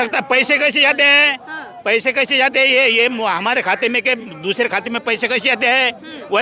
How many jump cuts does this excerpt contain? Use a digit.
0